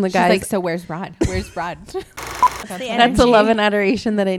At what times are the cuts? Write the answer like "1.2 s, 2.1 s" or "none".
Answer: 2.5 s